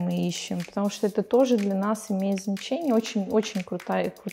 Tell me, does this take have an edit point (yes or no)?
no